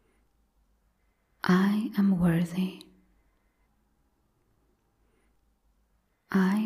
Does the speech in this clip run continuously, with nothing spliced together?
yes; 0 cuts

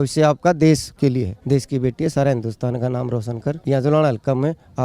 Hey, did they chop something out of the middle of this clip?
yes; 2 cuts; at 1.1 s, 3.6 s

